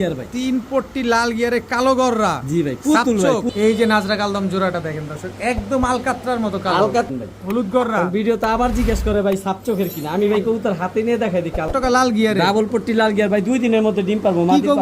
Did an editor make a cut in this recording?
yes; 3 cuts; at 3.5 s, 7.1 s, 11.7 s

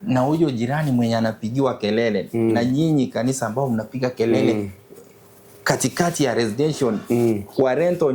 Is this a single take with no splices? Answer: yes; 0 cuts

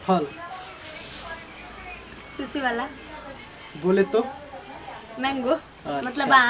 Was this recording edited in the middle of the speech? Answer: no; 0 cuts

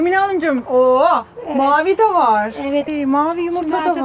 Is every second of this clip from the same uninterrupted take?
yes; 0 cuts

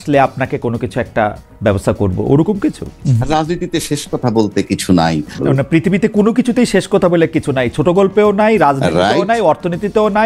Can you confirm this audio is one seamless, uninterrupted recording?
no; 2 cuts; at 3.0 s, 5.4 s

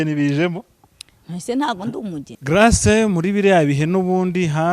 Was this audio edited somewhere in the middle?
yes; 1 cut; at 2.3 s

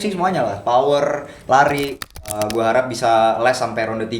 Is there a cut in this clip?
yes; 1 cut; at 2.3 s

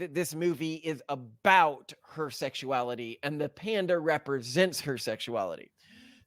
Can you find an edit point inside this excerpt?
no; 0 cuts

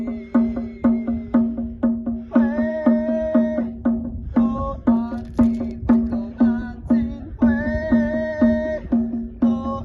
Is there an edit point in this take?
no; 0 cuts

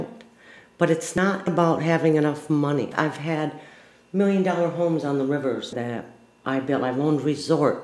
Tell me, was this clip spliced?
yes; 3 cuts; at 1.2 s, 2.9 s, 5.7 s

